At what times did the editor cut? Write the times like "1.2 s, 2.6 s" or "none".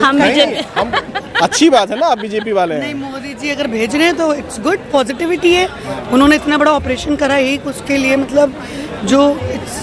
none

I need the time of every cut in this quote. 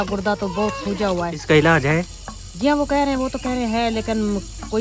1.4 s

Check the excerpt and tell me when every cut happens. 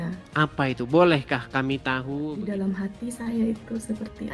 2.4 s

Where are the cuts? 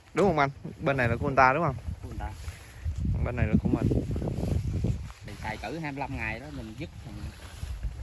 5.3 s

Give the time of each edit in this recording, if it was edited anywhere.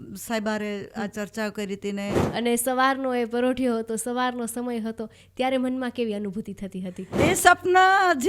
2.2 s, 7.1 s

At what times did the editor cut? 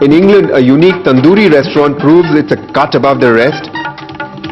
3.4 s

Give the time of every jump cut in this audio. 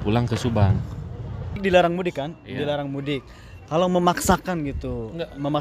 1.6 s

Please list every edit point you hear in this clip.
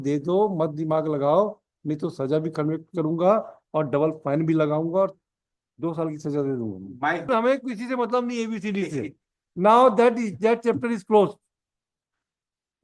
7.2 s

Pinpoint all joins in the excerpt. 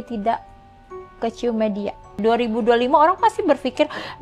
2.2 s

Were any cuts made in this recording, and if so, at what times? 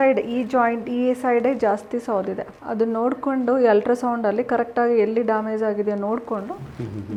none

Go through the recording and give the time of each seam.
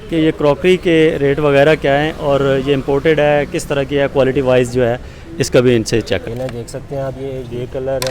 6.3 s

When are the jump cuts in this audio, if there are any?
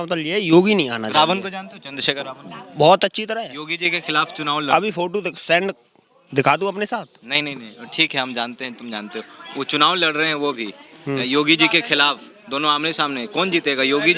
none

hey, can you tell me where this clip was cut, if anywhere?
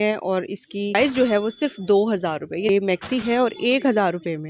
0.9 s, 2.8 s

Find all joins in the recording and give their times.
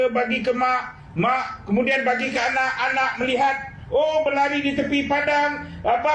none

